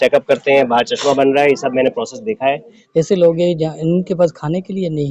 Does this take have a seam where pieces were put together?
yes; 1 cut; at 2.7 s

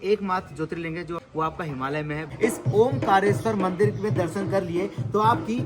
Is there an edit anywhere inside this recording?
yes; 2 cuts; at 1.2 s, 2.3 s

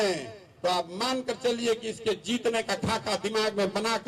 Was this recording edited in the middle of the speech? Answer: no; 0 cuts

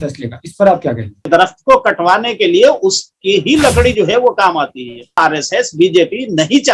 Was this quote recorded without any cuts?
no; 2 cuts; at 1.3 s, 5.2 s

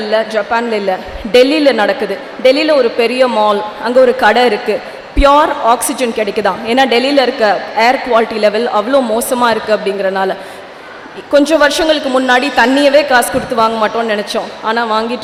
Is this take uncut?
yes; 0 cuts

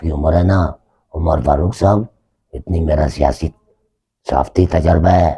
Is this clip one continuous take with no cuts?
yes; 0 cuts

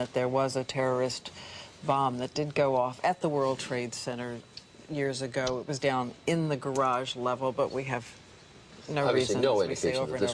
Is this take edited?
yes; 1 cut; at 1.0 s

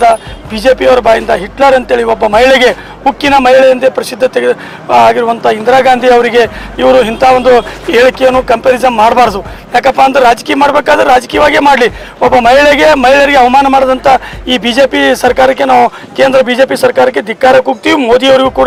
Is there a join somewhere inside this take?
no; 0 cuts

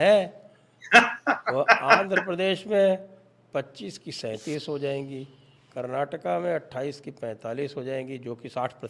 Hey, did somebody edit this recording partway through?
no; 0 cuts

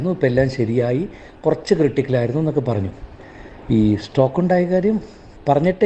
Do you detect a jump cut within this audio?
no; 0 cuts

